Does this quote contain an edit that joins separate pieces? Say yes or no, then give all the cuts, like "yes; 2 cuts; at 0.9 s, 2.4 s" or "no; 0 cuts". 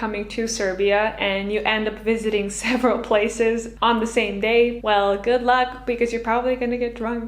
yes; 2 cuts; at 3.7 s, 4.8 s